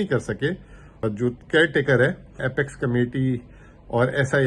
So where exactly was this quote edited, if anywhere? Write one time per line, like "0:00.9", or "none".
0:00.9
0:02.4